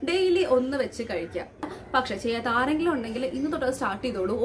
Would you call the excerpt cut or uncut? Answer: cut